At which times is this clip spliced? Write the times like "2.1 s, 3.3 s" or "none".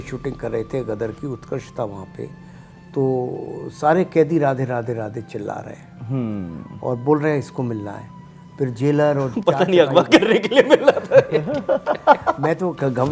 none